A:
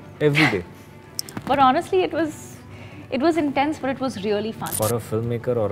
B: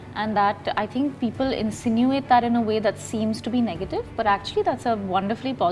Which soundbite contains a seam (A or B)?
A